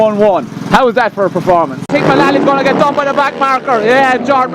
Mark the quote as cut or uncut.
cut